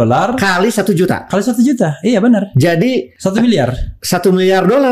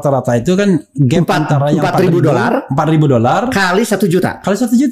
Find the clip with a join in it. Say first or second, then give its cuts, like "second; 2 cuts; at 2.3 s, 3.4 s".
first; 1 cut; at 3.1 s